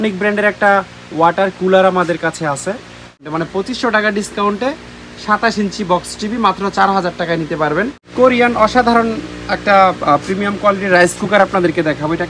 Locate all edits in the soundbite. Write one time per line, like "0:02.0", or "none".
0:03.3
0:08.0

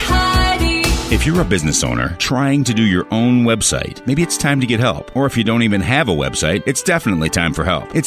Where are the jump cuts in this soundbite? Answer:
0:00.9

